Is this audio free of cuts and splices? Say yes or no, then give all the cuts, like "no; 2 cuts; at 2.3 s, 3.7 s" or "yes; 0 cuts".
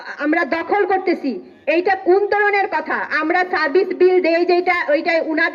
yes; 0 cuts